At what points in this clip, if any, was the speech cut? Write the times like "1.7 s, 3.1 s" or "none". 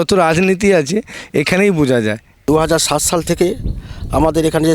2.3 s